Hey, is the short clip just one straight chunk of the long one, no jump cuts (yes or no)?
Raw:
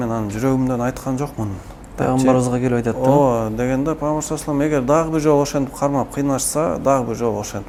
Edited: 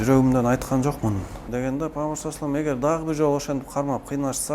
no